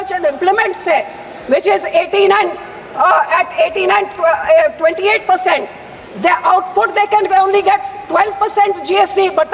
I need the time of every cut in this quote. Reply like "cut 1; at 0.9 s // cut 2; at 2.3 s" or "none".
none